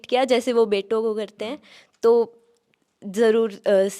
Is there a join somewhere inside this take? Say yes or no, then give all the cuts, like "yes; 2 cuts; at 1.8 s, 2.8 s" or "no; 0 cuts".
no; 0 cuts